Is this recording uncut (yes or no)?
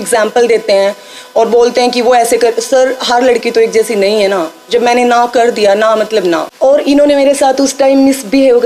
no